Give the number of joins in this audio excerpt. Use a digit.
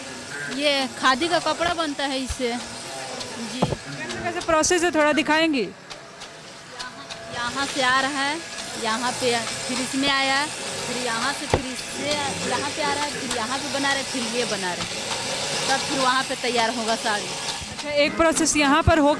0